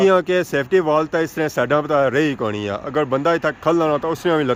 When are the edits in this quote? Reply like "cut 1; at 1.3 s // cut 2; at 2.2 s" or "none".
none